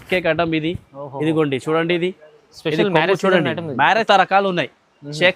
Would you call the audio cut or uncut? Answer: cut